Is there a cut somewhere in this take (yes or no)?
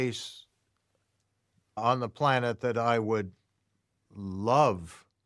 no